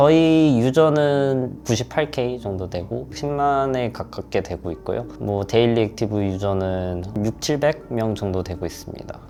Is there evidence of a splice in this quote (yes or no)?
no